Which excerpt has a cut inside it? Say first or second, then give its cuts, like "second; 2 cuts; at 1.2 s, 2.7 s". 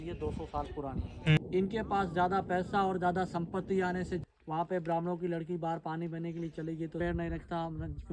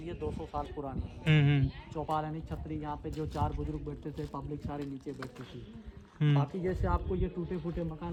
first; 3 cuts; at 1.4 s, 4.2 s, 7.0 s